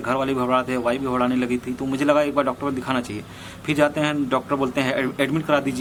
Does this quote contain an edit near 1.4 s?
no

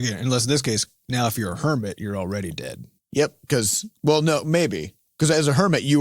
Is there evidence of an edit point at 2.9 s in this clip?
yes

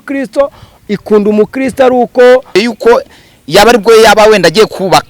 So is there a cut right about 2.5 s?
yes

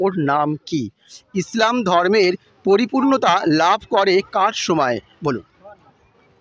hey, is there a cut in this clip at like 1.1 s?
yes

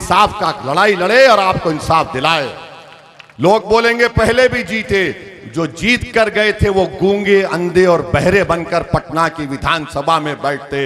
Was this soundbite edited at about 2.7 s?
no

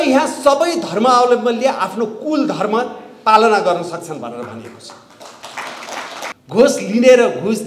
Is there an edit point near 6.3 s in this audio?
yes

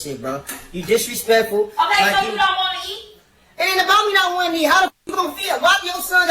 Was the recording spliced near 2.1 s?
yes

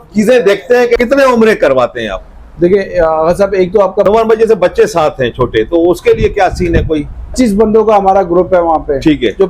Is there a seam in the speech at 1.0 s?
yes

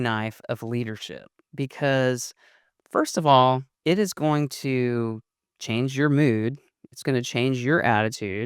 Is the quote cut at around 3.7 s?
yes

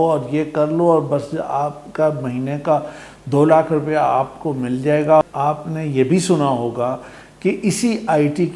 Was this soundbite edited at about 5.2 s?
yes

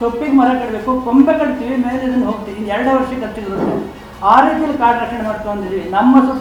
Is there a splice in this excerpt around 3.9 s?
no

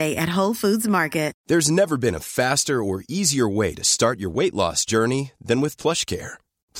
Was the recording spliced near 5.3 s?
no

